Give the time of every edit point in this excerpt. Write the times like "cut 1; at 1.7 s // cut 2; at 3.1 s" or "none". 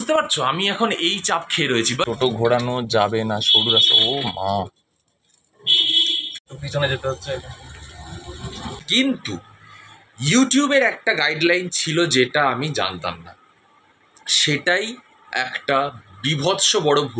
cut 1; at 2.1 s // cut 2; at 6.5 s // cut 3; at 8.8 s